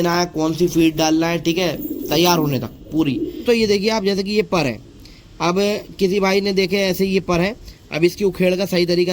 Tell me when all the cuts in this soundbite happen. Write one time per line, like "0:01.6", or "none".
0:03.4